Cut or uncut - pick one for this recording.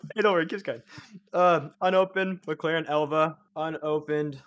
cut